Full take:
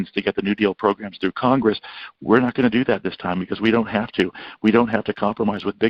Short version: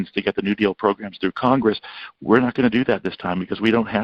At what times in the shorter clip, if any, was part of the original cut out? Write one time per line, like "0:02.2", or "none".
none